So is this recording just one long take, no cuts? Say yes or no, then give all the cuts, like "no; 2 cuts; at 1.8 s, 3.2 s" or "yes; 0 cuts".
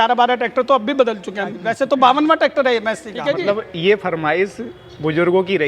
no; 2 cuts; at 1.6 s, 3.1 s